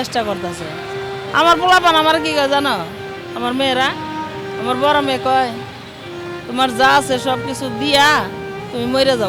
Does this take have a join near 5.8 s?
no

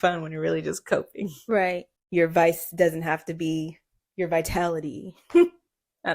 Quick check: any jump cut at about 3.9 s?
no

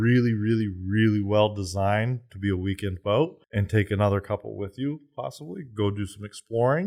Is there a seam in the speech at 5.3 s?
no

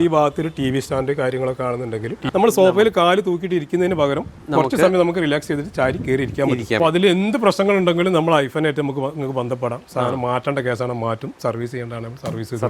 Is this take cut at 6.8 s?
yes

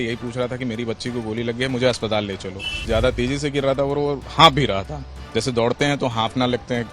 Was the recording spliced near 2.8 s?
yes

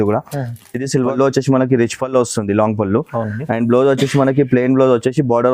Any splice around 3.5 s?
no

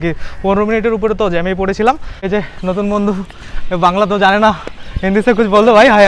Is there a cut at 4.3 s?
no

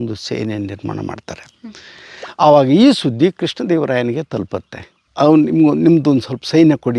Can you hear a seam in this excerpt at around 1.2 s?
no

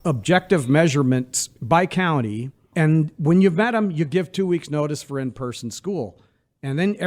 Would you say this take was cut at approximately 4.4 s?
no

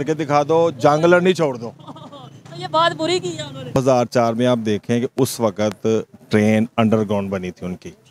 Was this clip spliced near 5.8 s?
no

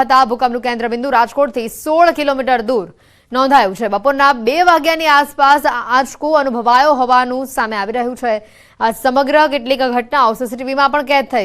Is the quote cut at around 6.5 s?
no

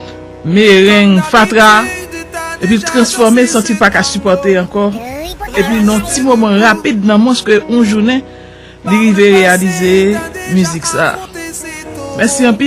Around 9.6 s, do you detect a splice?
yes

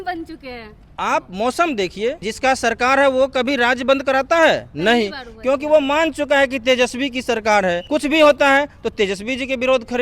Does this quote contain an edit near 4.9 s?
no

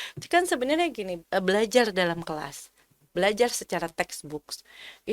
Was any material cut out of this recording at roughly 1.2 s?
yes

